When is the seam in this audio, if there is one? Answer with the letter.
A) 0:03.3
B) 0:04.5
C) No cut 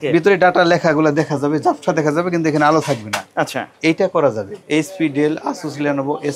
B